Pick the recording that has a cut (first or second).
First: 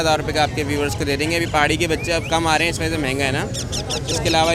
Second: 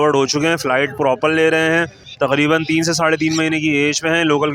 second